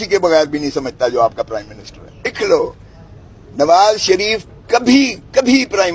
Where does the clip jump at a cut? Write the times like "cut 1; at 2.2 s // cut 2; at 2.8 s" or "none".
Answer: cut 1; at 2.3 s